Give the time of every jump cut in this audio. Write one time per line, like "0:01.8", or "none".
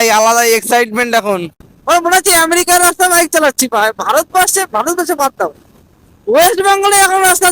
0:01.5

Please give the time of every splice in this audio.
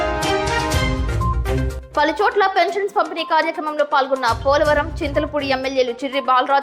0:01.8

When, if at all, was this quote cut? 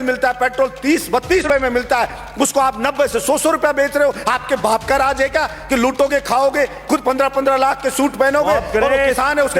0:01.4

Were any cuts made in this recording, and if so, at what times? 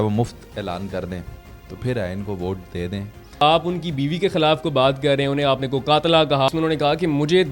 0:03.4
0:06.5

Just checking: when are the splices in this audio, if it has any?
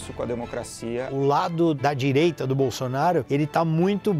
0:01.1
0:01.8
0:03.3

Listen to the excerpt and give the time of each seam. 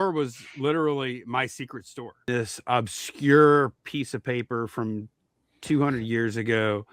0:02.3

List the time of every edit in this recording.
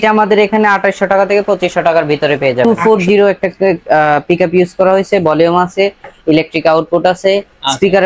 0:02.7

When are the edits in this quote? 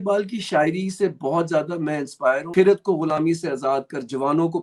0:02.5

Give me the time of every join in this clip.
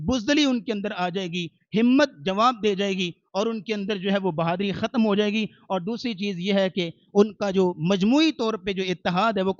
none

